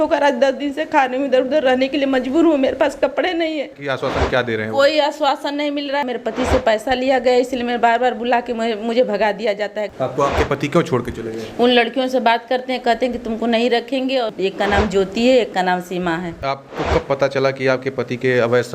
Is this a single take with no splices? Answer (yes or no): no